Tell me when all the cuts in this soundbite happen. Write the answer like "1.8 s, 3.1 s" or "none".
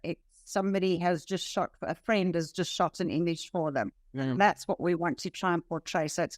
4.0 s